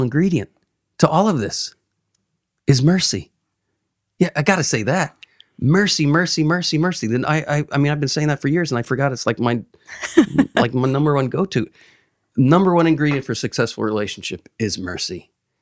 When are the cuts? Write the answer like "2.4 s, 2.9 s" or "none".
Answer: none